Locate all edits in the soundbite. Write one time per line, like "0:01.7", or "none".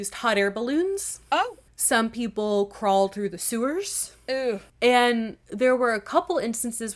0:01.7
0:04.7
0:05.4